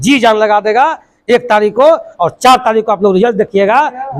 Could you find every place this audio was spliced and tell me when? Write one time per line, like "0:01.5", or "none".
none